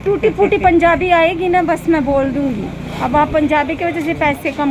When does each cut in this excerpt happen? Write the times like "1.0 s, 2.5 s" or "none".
none